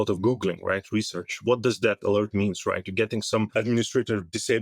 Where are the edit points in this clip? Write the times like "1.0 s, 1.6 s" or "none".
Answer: 1.4 s, 3.5 s